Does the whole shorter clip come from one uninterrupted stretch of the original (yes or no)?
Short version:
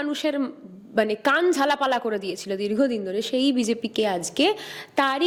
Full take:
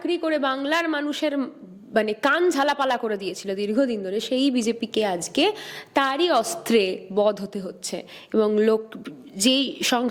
yes